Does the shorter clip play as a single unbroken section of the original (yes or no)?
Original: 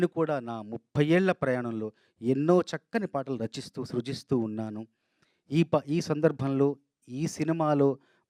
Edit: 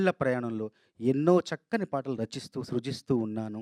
yes